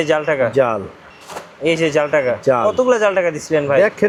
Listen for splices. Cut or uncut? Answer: uncut